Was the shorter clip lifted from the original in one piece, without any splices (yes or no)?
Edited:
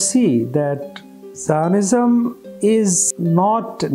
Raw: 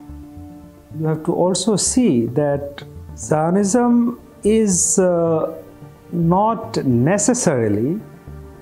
no